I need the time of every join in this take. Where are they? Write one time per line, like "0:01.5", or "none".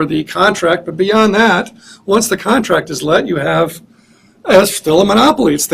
0:04.4